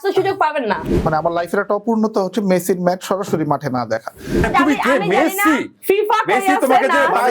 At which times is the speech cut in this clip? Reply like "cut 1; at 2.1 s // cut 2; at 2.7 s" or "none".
cut 1; at 0.8 s // cut 2; at 4.5 s

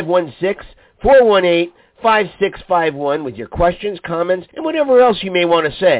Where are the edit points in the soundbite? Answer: cut 1; at 4.5 s

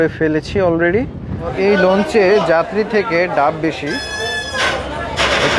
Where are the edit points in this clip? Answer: cut 1; at 1.5 s

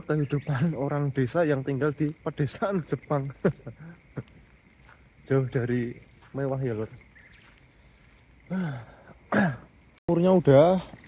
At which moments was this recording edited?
cut 1; at 10.1 s

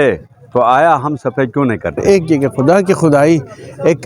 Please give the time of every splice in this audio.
cut 1; at 2.0 s

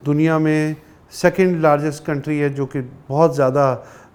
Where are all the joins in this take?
none

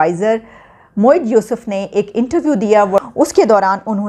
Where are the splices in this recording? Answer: cut 1; at 3.0 s

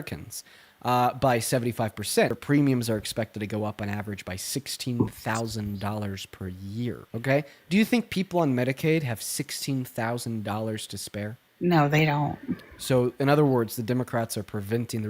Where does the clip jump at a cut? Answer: cut 1; at 2.4 s // cut 2; at 7.0 s // cut 3; at 11.4 s

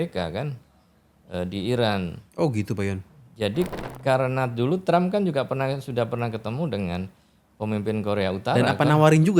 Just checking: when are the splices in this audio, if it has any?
cut 1; at 3.9 s

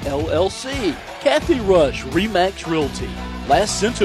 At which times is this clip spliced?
cut 1; at 1.1 s

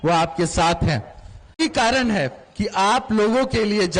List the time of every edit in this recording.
cut 1; at 1.6 s

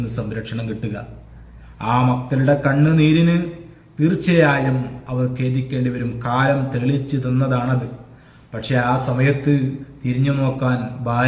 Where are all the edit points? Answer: none

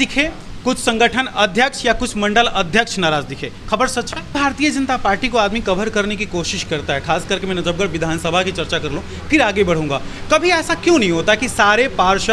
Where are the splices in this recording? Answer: cut 1; at 4.3 s

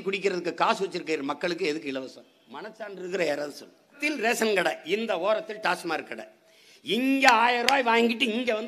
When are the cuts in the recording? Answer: cut 1; at 4.0 s

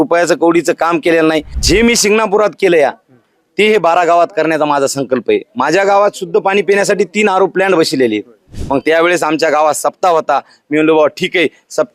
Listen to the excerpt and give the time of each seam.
cut 1; at 1.5 s // cut 2; at 8.5 s

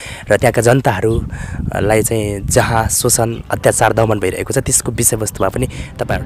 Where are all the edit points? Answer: none

